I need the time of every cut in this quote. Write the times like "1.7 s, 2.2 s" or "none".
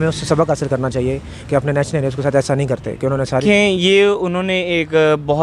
3.4 s